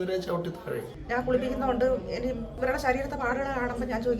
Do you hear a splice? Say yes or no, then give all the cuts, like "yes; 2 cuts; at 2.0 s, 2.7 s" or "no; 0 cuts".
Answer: yes; 2 cuts; at 0.9 s, 2.5 s